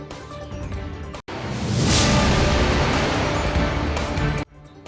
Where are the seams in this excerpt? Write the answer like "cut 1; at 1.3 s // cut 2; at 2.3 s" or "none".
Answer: cut 1; at 1.2 s